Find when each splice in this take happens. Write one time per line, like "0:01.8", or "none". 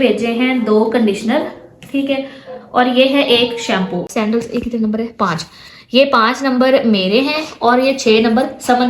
0:04.1